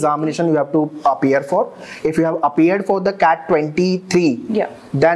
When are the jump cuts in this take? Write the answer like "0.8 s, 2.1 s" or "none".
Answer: none